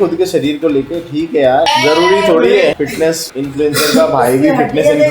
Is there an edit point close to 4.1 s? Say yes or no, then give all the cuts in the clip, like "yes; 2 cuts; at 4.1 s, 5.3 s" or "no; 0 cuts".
no; 2 cuts; at 1.7 s, 2.9 s